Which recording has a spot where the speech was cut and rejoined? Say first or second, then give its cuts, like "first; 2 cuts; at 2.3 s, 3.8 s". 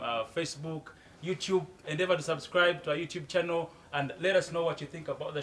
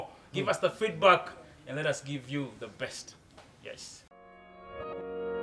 second; 1 cut; at 4.1 s